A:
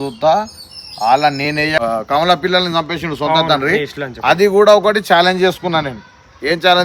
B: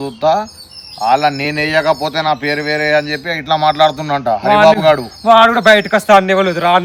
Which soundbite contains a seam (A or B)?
A